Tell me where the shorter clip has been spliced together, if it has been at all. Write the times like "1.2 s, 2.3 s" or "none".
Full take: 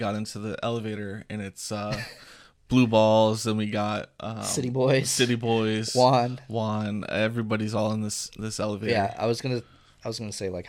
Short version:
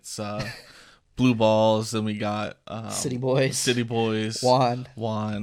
none